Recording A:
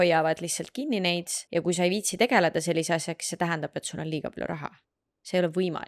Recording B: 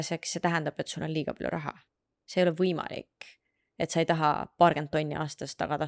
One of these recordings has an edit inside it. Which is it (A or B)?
A